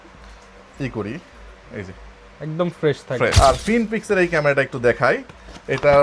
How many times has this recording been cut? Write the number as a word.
one